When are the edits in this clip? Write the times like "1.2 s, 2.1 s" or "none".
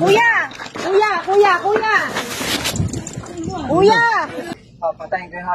4.5 s